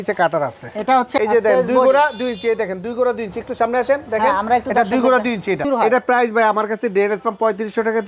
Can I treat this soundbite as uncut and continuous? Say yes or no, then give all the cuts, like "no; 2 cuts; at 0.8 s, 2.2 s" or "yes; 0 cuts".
no; 2 cuts; at 1.2 s, 5.6 s